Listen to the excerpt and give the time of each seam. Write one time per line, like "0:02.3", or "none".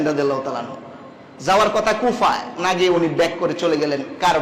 none